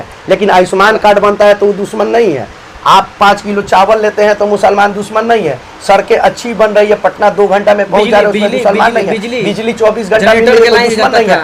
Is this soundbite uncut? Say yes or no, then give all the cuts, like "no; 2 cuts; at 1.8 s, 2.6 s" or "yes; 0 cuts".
yes; 0 cuts